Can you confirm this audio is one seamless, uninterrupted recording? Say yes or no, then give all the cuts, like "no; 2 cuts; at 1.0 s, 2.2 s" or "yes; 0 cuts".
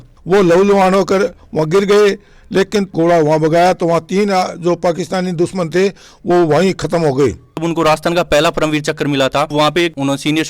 no; 3 cuts; at 2.9 s, 7.6 s, 9.5 s